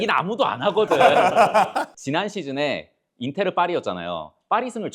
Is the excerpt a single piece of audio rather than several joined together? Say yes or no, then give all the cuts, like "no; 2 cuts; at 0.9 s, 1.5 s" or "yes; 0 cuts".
no; 1 cut; at 1.9 s